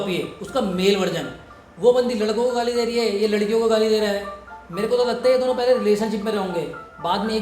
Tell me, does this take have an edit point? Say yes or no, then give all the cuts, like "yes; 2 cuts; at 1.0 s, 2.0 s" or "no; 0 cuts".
yes; 1 cut; at 4.4 s